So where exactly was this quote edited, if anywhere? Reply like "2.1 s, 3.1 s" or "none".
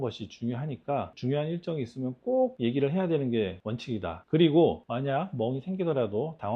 4.2 s